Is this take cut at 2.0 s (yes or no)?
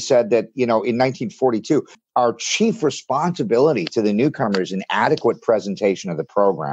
yes